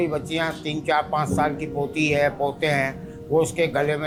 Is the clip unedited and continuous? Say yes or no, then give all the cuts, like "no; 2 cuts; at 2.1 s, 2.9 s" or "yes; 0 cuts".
yes; 0 cuts